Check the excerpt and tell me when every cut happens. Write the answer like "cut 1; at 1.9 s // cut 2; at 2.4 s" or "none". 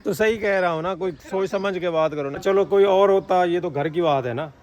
cut 1; at 2.3 s